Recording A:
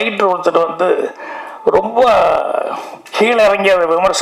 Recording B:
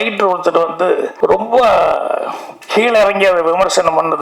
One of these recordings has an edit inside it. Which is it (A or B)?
B